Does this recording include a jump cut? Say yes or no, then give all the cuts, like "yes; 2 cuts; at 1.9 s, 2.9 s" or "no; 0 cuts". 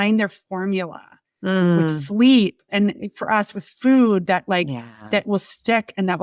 no; 0 cuts